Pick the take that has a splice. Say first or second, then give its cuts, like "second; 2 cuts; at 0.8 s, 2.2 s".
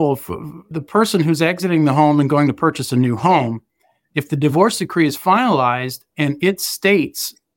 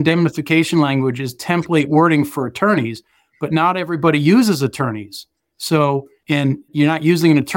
second; 1 cut; at 6.1 s